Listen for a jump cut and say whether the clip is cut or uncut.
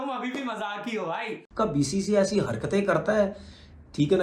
cut